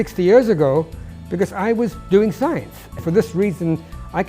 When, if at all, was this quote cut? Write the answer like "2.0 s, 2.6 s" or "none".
3.0 s